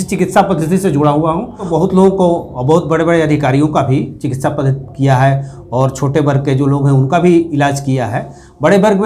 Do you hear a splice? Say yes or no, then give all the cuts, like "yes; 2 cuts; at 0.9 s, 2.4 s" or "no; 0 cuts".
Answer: yes; 1 cut; at 1.6 s